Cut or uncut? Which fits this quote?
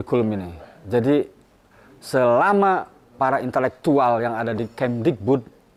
uncut